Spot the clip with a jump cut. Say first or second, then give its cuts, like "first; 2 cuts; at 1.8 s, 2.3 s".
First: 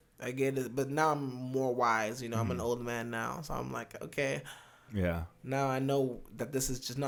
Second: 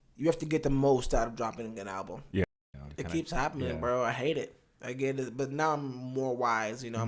second; 1 cut; at 2.4 s